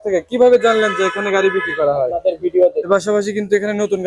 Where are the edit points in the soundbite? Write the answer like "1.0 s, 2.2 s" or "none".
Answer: 2.9 s